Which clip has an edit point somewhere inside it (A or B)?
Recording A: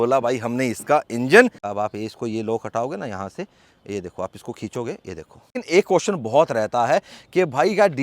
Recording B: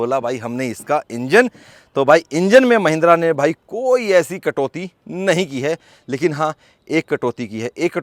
A